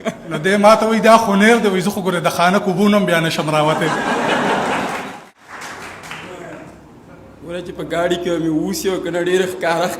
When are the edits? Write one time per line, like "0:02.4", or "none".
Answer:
0:05.3